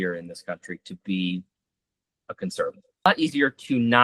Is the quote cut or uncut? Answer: cut